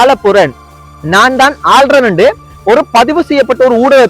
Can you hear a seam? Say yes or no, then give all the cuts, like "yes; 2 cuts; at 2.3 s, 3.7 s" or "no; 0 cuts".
no; 0 cuts